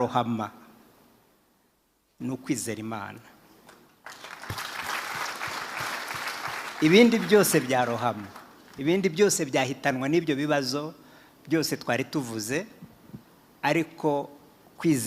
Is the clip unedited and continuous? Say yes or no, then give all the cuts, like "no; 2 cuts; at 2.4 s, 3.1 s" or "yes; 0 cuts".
yes; 0 cuts